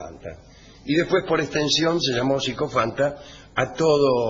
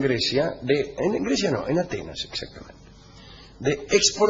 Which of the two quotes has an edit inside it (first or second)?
first